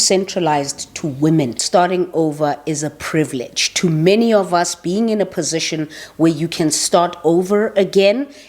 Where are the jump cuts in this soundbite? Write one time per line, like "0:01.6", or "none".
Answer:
0:01.6